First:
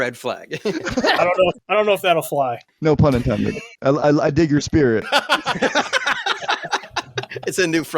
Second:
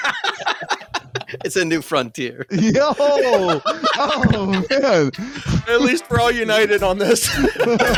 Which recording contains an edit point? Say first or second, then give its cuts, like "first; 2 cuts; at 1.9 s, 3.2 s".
first; 4 cuts; at 1.6 s, 2.7 s, 3.7 s, 5.1 s